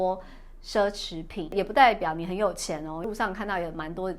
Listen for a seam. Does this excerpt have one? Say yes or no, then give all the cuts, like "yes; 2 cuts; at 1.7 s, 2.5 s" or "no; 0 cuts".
yes; 2 cuts; at 1.5 s, 3.1 s